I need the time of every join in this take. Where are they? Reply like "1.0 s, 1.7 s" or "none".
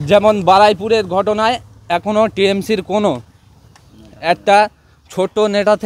none